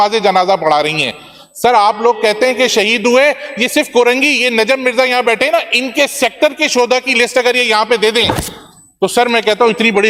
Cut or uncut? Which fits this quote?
uncut